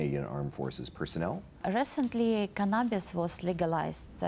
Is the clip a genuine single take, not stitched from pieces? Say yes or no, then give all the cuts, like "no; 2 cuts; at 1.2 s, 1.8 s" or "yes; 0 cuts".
no; 1 cut; at 1.5 s